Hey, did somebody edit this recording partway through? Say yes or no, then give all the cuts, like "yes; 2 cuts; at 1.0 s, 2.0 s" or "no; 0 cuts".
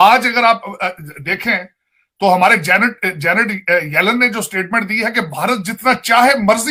no; 0 cuts